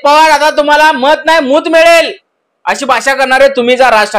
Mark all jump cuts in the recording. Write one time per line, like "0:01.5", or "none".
none

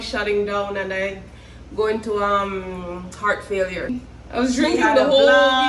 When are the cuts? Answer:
0:03.9

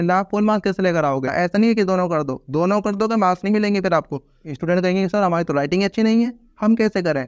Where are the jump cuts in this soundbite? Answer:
0:01.3
0:04.5

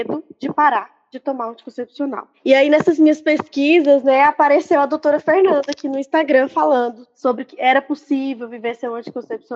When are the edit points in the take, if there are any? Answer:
none

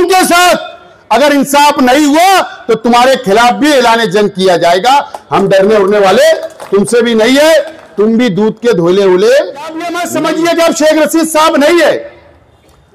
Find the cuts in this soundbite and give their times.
0:10.0

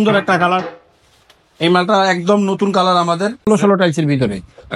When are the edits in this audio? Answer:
0:03.4

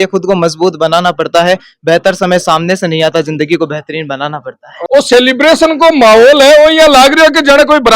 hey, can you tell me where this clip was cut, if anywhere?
0:04.7

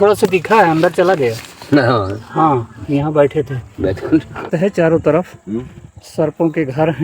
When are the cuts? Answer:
0:04.5

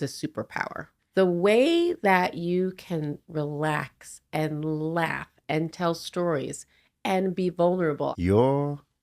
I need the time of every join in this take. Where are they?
0:01.0
0:08.1

